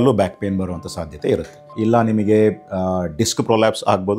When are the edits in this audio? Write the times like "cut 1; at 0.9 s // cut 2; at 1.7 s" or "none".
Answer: cut 1; at 1.7 s